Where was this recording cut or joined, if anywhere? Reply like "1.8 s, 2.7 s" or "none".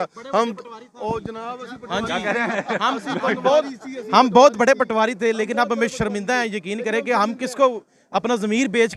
none